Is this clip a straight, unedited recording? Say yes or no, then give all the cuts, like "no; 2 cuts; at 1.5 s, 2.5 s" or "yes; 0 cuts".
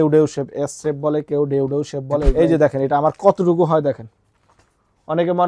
no; 1 cut; at 2.3 s